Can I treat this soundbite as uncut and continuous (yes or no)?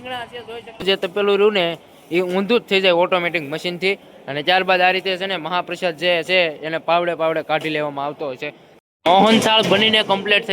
no